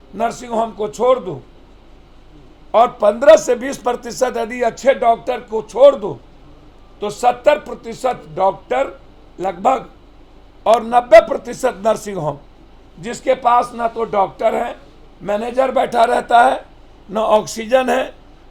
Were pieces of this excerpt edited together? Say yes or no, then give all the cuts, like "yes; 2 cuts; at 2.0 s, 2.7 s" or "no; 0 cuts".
no; 0 cuts